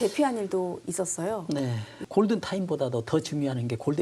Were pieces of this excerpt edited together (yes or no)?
yes